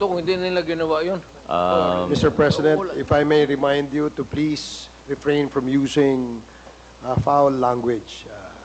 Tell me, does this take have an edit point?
yes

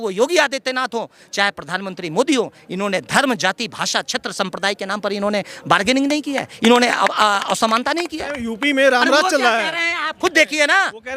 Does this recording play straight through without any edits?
no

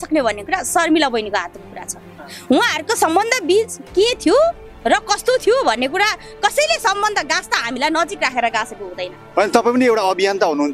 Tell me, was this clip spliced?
no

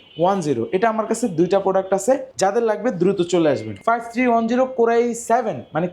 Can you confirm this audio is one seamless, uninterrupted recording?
no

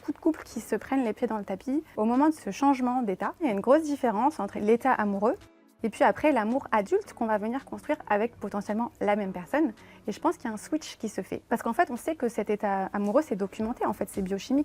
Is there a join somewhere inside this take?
yes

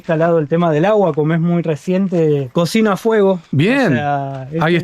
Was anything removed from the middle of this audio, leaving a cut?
yes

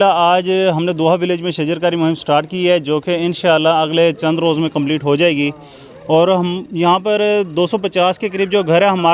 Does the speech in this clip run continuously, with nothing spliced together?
yes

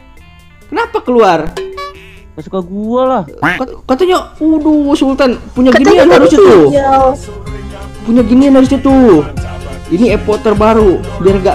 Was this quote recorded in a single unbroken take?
yes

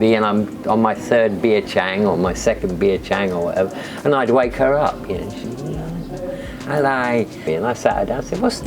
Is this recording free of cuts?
no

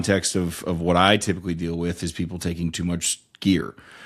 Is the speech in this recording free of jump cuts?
yes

